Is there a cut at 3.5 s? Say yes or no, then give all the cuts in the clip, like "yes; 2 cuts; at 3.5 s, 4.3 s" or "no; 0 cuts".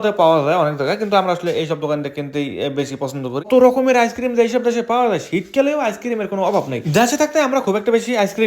yes; 1 cut; at 3.5 s